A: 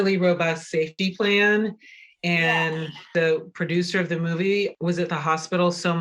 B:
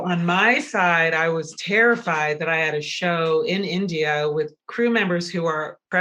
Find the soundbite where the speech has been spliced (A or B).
A